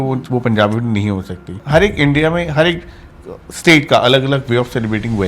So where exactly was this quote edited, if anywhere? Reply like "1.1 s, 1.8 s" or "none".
1.6 s